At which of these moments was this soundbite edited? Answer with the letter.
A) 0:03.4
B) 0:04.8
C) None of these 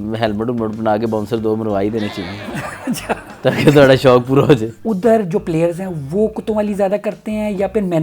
B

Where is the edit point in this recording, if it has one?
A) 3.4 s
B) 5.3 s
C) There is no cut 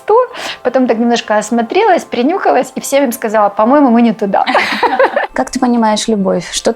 B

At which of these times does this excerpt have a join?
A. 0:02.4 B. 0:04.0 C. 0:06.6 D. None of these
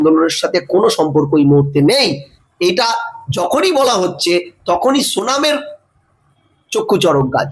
A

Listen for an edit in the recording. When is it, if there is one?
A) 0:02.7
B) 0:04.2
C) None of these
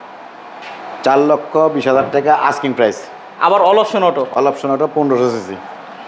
C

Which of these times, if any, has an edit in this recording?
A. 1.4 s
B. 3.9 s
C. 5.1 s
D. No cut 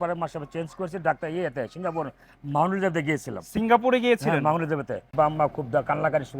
C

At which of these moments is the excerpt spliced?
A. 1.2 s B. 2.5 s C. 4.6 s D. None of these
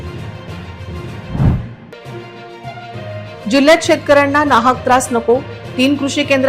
A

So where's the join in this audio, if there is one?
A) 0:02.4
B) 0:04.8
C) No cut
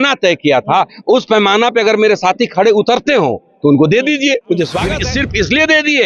B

